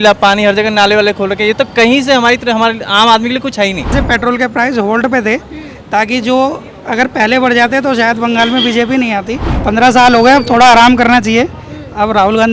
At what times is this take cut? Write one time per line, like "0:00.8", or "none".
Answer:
0:03.9
0:09.4

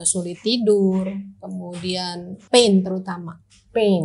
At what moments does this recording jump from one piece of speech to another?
0:02.3

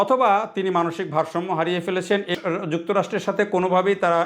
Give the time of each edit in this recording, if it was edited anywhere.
0:02.3

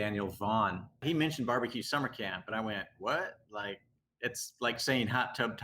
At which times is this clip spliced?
0:01.0

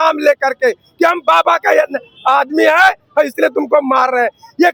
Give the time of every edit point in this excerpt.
none

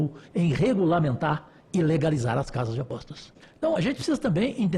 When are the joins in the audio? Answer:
0:03.4

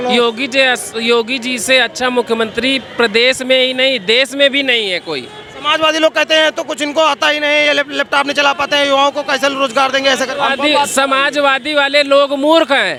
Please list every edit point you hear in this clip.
none

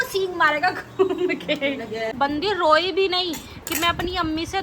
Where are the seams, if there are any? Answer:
0:02.1

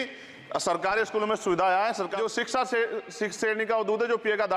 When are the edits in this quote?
0:02.1

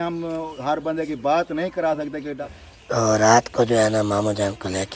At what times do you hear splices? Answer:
0:02.4

